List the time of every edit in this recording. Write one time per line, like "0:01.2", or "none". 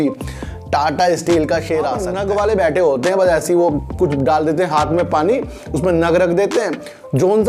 0:02.1